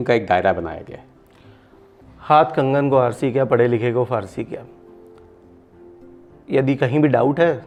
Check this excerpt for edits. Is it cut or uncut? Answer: uncut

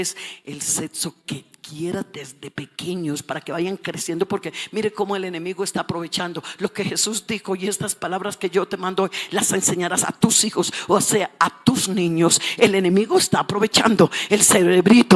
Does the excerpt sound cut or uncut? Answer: uncut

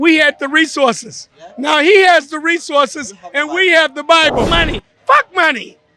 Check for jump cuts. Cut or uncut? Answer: cut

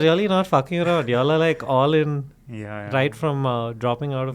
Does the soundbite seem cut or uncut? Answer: uncut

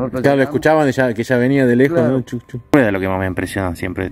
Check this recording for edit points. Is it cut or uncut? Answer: cut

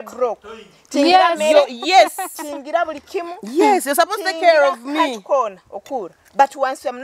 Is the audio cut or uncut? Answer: uncut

